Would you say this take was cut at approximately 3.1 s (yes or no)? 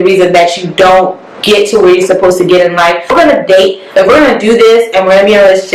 yes